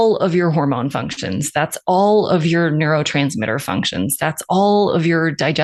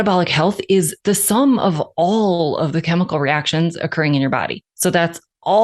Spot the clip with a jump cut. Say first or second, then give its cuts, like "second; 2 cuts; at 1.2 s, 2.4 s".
second; 2 cuts; at 0.9 s, 4.6 s